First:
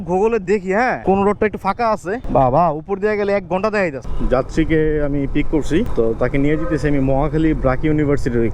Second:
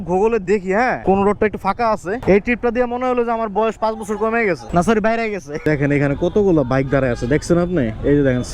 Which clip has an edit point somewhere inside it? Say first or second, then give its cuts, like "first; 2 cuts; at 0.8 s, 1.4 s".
second; 2 cuts; at 2.1 s, 5.6 s